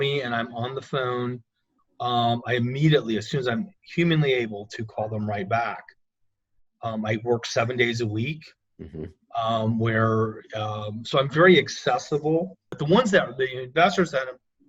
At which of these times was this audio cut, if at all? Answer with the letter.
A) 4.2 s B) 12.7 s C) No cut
B